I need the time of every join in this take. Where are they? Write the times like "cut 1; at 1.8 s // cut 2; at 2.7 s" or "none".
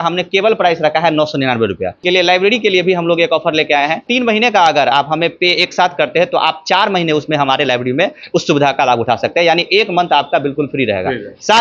cut 1; at 2.0 s // cut 2; at 4.0 s